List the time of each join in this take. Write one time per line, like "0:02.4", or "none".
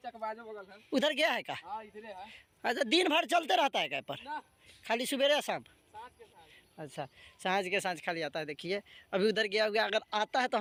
none